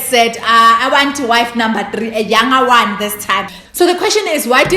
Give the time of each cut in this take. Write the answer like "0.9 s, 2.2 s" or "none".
3.5 s